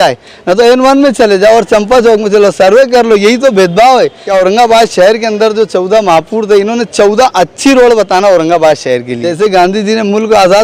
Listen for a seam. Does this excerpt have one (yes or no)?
yes